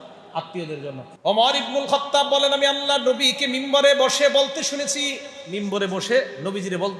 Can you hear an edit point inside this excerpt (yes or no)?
yes